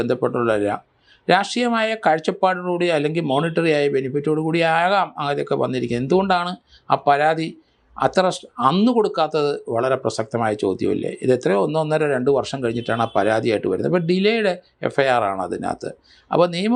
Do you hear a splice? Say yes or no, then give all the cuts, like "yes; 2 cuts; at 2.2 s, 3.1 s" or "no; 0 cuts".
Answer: no; 0 cuts